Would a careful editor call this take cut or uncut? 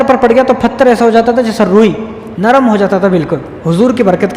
uncut